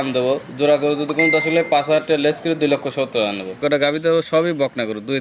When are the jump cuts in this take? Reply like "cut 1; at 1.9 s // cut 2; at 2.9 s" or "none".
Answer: cut 1; at 3.5 s